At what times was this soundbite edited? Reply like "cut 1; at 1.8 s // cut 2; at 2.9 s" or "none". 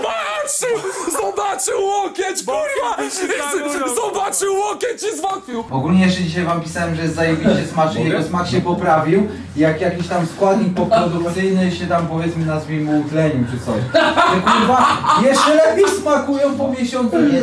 cut 1; at 5.7 s